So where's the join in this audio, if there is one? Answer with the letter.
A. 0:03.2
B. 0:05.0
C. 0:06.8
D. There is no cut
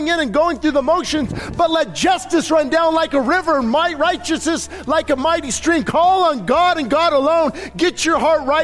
D